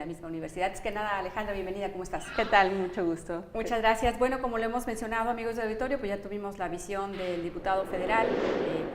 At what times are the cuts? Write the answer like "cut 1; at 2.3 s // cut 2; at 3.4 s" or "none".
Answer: cut 1; at 3.5 s